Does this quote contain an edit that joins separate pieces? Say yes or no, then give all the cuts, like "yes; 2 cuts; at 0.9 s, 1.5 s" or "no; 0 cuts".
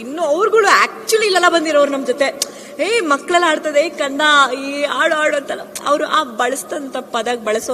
no; 0 cuts